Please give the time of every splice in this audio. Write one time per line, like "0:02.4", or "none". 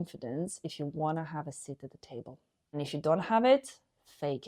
0:02.8